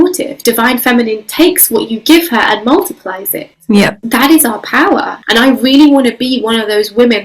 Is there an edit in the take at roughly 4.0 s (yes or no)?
yes